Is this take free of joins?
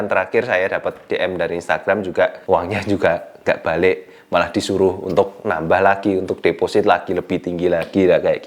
no; 1 cut; at 2.4 s

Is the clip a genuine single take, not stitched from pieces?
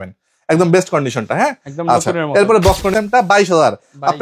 no; 1 cut; at 2.9 s

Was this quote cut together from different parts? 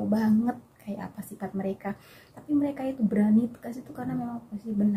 no; 0 cuts

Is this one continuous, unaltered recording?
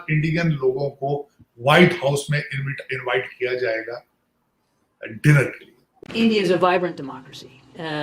no; 1 cut; at 5.9 s

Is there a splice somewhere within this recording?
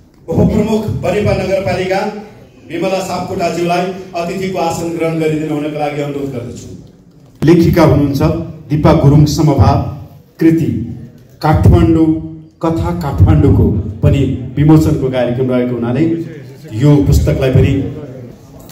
yes; 1 cut; at 7.3 s

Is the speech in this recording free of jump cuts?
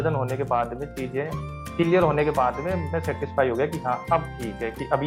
yes; 0 cuts

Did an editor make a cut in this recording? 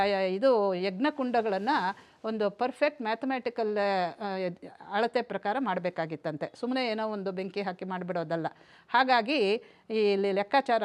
no; 0 cuts

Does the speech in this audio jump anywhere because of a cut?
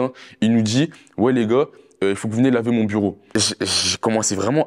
no; 0 cuts

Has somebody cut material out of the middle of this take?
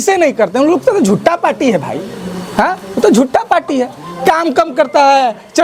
no; 0 cuts

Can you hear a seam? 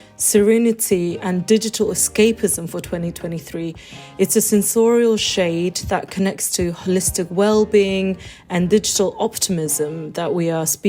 no; 0 cuts

